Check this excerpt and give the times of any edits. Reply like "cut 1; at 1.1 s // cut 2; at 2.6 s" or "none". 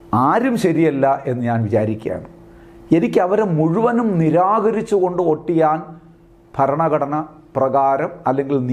none